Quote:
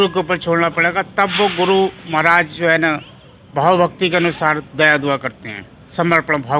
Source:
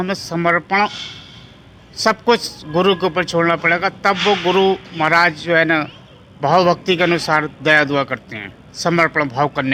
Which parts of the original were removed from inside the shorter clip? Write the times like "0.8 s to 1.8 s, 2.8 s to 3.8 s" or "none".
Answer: none